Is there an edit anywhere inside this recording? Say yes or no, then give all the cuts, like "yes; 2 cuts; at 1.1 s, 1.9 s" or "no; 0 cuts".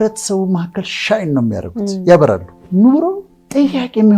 yes; 1 cut; at 2.5 s